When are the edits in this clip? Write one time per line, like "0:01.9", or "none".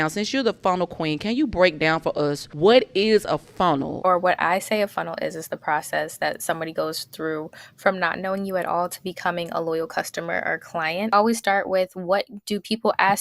0:02.4
0:03.9
0:11.1